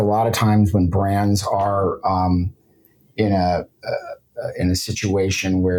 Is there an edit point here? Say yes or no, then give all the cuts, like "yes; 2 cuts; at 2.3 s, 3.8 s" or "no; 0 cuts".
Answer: no; 0 cuts